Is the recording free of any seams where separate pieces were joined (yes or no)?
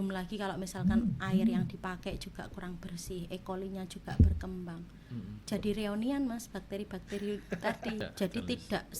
no